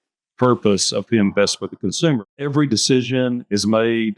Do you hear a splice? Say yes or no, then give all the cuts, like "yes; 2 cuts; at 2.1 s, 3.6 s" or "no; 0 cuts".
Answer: yes; 1 cut; at 2.2 s